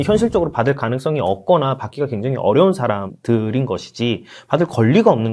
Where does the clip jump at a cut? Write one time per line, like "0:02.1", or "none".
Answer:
none